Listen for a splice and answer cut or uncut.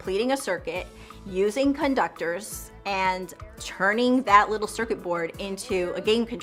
uncut